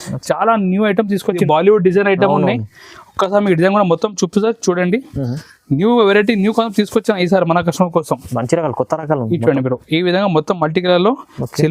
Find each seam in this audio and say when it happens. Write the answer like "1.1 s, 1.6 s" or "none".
1.4 s